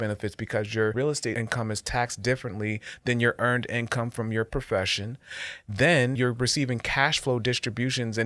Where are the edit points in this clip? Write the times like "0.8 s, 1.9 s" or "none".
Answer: 1.1 s, 6.2 s